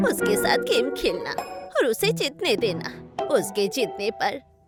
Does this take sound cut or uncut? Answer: uncut